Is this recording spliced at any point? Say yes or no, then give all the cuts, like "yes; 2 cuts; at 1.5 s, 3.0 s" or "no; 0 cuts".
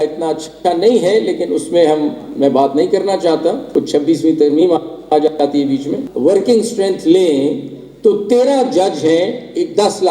yes; 2 cuts; at 3.6 s, 6.0 s